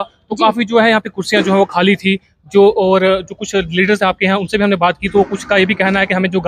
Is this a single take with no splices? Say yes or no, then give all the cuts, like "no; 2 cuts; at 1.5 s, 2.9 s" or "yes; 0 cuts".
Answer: yes; 0 cuts